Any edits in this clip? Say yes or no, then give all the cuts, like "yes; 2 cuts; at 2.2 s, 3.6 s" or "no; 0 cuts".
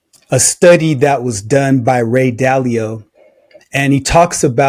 no; 0 cuts